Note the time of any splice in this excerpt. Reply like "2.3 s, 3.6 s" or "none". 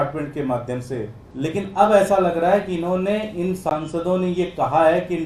1.2 s